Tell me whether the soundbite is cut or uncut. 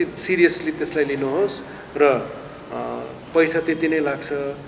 uncut